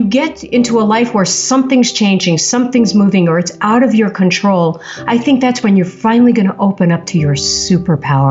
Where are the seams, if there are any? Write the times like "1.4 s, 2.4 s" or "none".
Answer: none